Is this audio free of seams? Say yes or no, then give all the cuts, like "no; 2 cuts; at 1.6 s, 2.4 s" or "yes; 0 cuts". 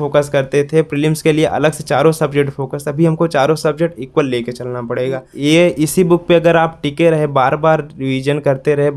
no; 1 cut; at 5.3 s